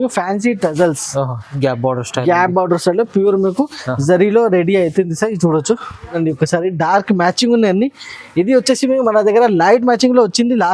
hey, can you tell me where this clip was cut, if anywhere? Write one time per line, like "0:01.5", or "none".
0:06.1